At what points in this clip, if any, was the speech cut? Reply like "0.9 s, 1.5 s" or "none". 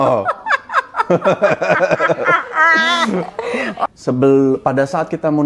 3.9 s